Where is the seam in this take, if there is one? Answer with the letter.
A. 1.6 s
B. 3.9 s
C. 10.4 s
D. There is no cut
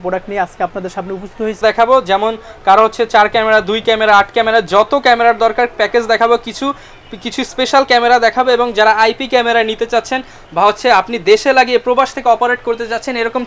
A